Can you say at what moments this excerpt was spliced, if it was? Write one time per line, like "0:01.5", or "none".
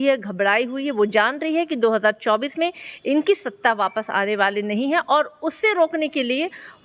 none